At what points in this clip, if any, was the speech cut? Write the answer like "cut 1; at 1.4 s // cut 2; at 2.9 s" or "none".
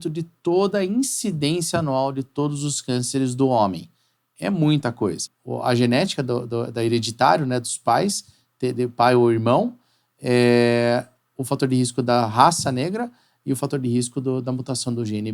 cut 1; at 5.3 s